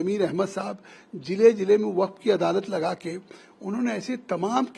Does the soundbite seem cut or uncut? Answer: uncut